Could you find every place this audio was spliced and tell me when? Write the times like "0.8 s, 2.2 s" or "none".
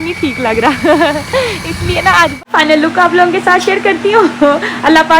2.4 s